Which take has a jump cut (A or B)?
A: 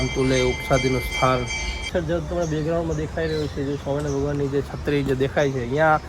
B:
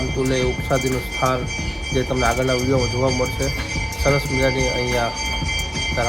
A